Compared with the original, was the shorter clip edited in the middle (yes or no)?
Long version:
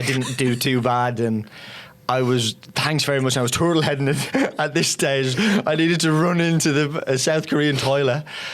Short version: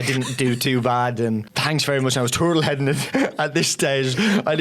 yes